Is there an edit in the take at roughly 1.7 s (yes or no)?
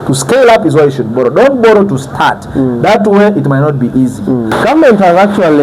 no